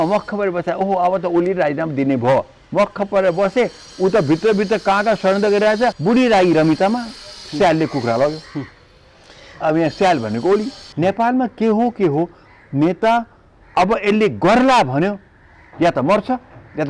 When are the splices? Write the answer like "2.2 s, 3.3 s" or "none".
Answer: 6.0 s, 10.8 s

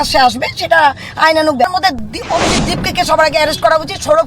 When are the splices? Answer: 1.6 s

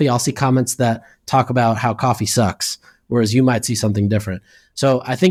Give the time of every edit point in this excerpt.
none

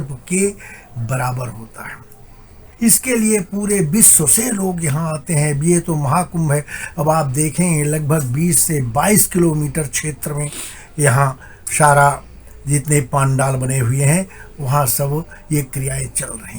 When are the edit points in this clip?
2.6 s

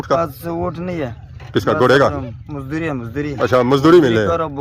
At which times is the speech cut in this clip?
none

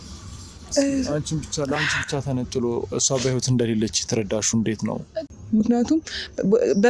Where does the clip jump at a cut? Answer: 5.3 s

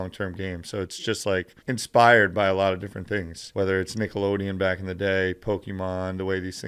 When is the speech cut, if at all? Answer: 1.5 s, 3.4 s

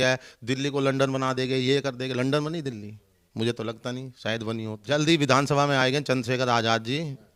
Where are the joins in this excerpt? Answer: 4.8 s

